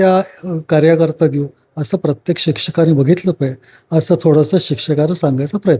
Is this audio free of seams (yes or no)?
yes